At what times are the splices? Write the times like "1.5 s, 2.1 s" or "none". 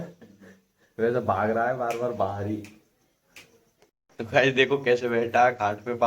4.0 s